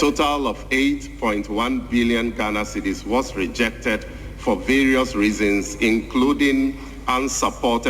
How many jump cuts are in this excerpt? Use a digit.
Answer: 0